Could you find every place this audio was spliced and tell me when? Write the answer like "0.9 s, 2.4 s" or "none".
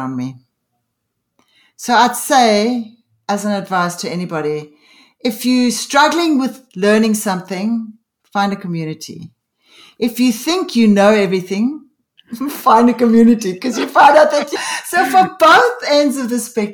14.5 s